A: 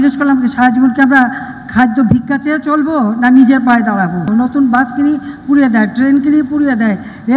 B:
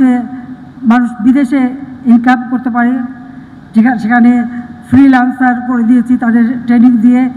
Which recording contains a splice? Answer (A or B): A